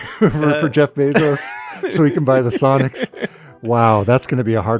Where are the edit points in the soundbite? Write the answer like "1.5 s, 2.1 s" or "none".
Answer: none

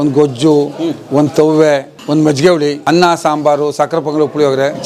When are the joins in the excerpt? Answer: 1.9 s, 2.8 s

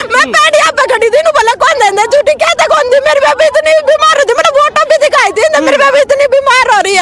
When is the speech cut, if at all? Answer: none

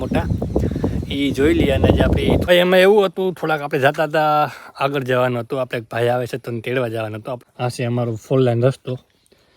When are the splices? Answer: 2.4 s, 7.4 s

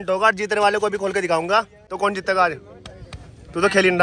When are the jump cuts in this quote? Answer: 1.9 s

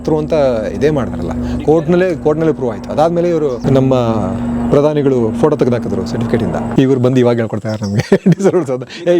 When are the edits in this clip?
3.6 s, 6.7 s

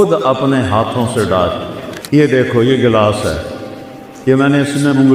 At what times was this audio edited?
1.8 s

